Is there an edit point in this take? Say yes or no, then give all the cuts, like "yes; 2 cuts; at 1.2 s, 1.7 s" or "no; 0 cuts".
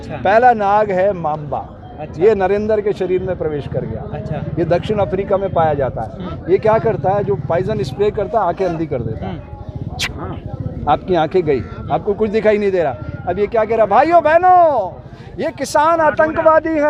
no; 0 cuts